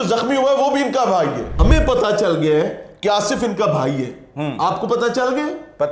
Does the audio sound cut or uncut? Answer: cut